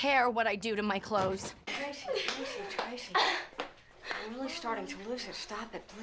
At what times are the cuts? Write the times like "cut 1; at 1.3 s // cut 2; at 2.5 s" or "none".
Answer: cut 1; at 1.6 s